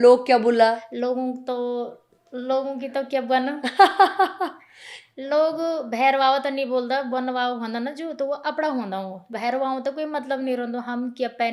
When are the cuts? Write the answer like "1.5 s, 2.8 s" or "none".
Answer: 9.3 s